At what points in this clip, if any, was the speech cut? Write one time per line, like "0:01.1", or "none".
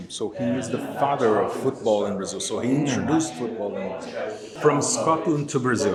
none